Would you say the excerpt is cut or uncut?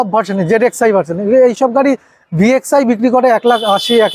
uncut